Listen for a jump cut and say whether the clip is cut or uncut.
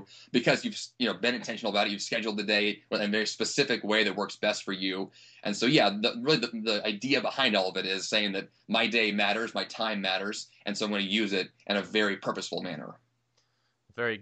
uncut